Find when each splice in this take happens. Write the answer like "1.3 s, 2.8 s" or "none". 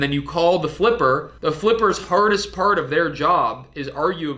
1.3 s